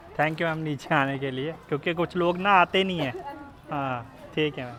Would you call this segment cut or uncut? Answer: uncut